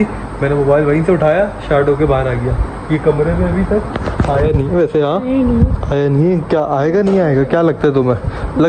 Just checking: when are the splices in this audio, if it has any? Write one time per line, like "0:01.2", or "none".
0:02.6